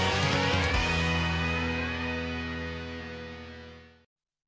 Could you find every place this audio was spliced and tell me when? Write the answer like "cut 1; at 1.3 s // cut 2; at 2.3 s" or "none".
none

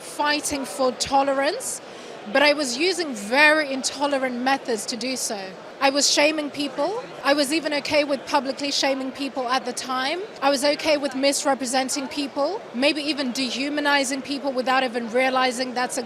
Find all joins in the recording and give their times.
cut 1; at 7.1 s // cut 2; at 10.3 s

